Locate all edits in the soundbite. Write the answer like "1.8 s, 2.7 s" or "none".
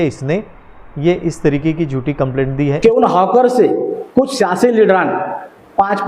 2.7 s

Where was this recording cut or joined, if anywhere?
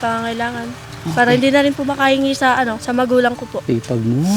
2.8 s, 3.5 s

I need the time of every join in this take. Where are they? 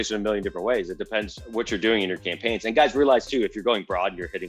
1.4 s

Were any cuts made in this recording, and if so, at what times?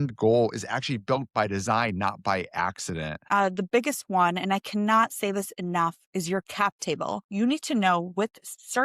3.2 s, 7.2 s

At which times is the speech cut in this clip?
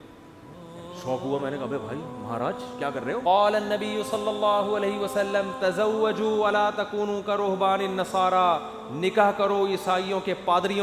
3.2 s

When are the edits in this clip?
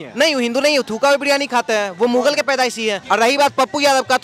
2.9 s

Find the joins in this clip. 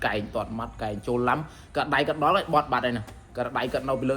none

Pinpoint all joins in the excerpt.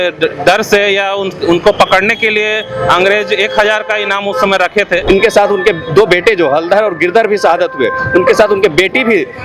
5.0 s

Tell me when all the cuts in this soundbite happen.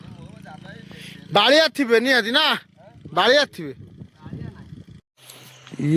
5.0 s

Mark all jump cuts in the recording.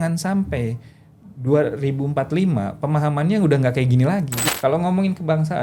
4.4 s

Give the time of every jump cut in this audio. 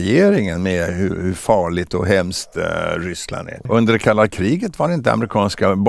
3.6 s

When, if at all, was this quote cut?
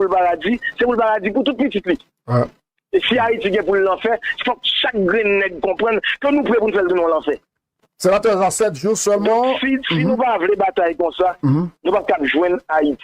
none

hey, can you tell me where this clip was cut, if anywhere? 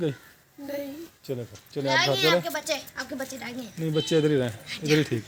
none

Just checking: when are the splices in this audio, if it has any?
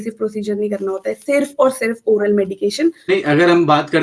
3.0 s

